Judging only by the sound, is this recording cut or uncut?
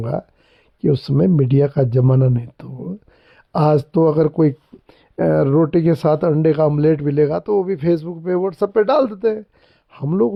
uncut